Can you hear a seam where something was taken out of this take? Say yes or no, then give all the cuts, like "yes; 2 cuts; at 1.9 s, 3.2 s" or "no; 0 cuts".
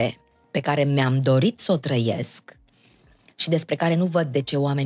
no; 0 cuts